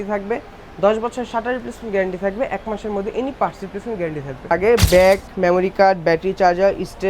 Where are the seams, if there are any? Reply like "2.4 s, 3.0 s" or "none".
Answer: 4.5 s